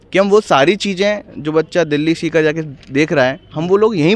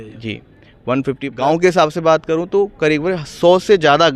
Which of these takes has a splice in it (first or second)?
second